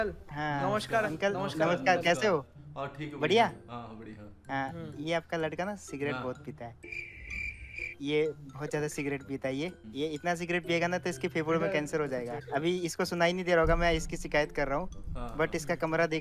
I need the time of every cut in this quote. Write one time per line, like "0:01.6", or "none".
none